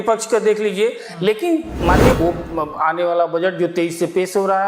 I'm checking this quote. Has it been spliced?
yes; 1 cut; at 2.2 s

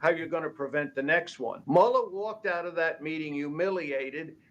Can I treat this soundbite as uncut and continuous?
no; 1 cut; at 1.6 s

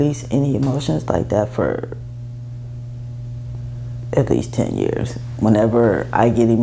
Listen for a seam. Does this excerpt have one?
no; 0 cuts

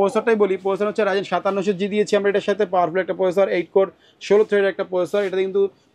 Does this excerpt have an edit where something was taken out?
no; 0 cuts

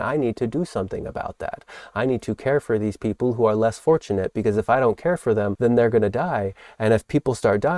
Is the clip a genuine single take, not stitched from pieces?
no; 1 cut; at 5.5 s

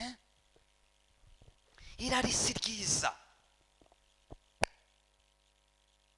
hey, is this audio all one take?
yes; 0 cuts

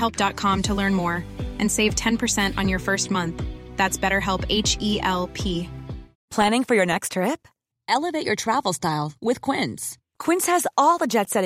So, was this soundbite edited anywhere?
yes; 1 cut; at 6.2 s

